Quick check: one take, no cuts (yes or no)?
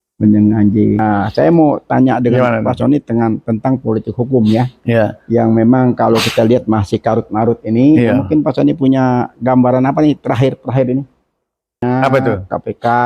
no